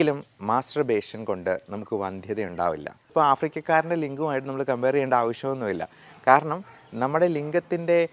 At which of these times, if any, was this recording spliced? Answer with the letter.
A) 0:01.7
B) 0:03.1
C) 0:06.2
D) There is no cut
B